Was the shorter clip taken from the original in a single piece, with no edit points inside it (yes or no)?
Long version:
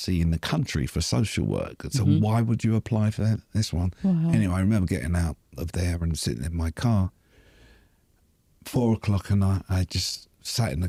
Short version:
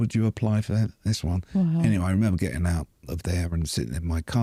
yes